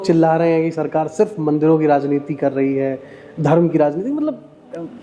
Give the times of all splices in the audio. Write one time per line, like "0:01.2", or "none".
none